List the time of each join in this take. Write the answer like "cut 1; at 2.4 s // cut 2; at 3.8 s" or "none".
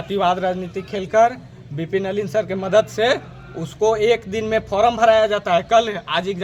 none